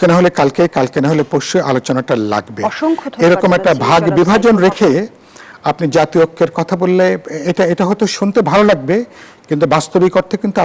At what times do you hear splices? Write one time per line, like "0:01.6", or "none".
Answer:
none